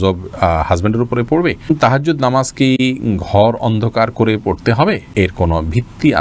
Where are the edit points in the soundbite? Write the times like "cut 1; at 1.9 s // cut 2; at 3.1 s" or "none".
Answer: cut 1; at 1.7 s // cut 2; at 5.0 s